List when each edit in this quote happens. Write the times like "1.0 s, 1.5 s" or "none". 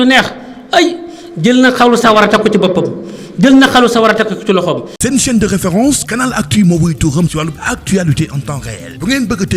4.9 s

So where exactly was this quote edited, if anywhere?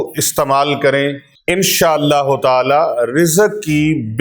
1.3 s

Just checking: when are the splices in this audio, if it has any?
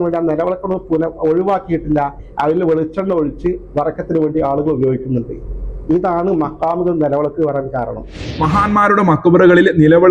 8.3 s

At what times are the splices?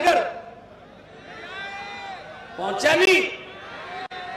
none

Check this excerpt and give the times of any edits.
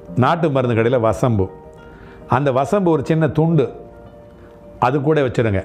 none

